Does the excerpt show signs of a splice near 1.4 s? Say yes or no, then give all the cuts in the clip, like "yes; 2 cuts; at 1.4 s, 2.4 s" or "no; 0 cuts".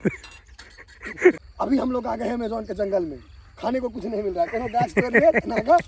yes; 1 cut; at 1.4 s